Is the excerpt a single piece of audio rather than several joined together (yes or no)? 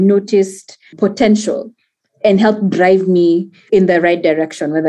no